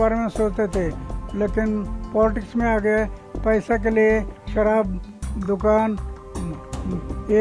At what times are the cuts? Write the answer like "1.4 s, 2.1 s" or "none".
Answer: none

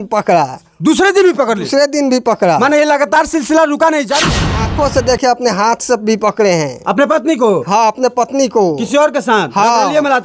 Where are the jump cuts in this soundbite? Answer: 4.4 s

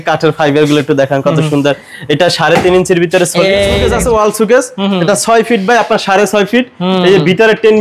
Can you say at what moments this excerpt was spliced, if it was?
3.9 s

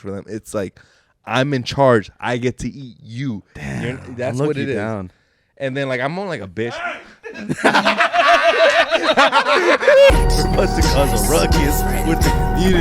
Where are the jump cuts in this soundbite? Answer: 10.1 s

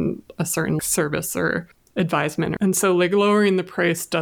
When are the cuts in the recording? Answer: 0.8 s, 1.8 s, 2.6 s

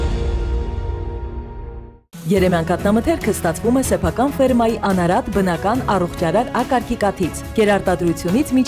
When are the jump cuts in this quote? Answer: 1.9 s

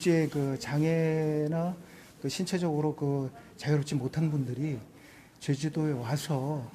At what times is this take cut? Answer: none

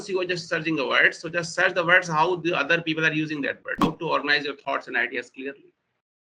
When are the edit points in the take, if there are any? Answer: 3.8 s

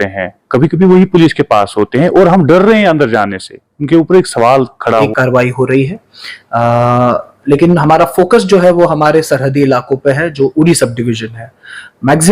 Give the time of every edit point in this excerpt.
5.1 s

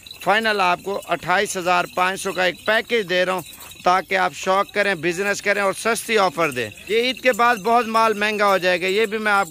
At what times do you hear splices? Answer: 6.9 s

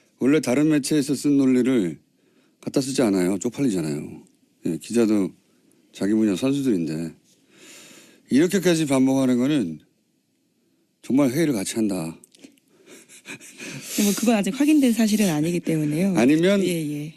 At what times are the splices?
6.9 s

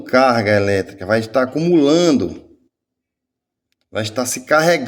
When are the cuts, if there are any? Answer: none

